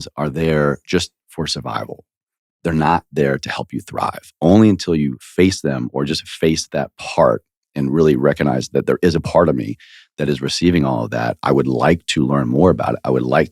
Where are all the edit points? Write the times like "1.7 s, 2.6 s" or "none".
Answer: none